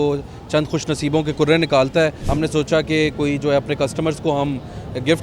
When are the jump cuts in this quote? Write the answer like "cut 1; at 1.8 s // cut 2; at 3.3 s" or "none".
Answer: cut 1; at 2.2 s